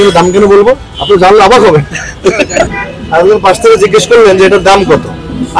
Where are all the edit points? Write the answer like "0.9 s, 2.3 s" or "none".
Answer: 2.8 s